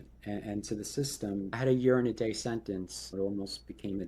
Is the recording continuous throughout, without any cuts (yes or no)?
no